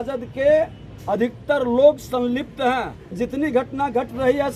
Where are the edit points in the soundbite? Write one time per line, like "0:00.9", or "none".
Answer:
0:03.2